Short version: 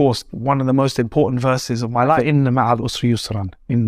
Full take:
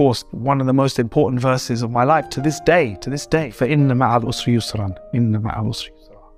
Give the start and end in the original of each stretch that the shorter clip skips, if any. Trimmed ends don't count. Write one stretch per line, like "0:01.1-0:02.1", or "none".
0:02.2-0:03.6